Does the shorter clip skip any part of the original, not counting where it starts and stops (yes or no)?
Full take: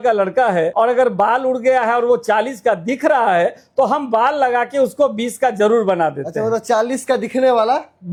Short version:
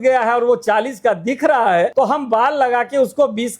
yes